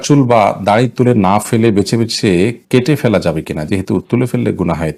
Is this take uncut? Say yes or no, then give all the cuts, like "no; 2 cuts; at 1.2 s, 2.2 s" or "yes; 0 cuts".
yes; 0 cuts